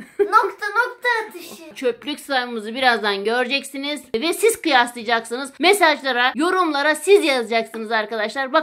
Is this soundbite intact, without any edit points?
no; 4 cuts; at 1.7 s, 4.1 s, 5.4 s, 6.3 s

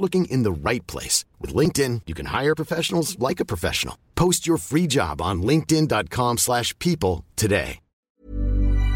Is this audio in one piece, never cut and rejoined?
no; 1 cut; at 8.1 s

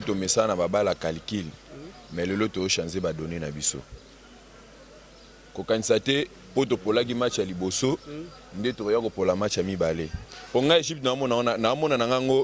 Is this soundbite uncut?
yes; 0 cuts

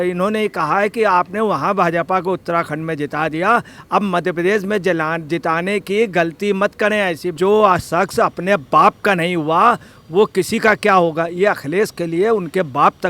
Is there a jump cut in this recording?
yes; 1 cut; at 7.4 s

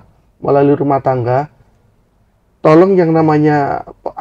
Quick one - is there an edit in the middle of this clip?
no; 0 cuts

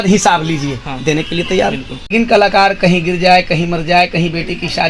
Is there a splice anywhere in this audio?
yes; 1 cut; at 2.1 s

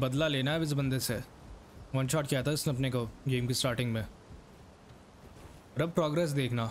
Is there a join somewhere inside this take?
no; 0 cuts

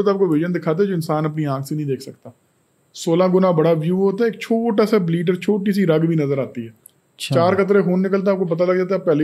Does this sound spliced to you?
no; 0 cuts

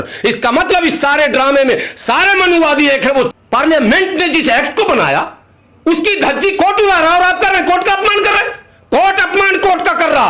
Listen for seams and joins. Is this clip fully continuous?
no; 1 cut; at 3.3 s

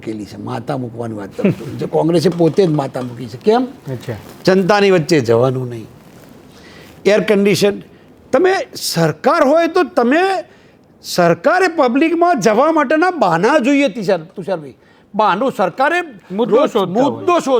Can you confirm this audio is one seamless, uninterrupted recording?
yes; 0 cuts

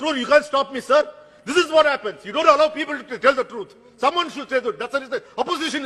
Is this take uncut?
yes; 0 cuts

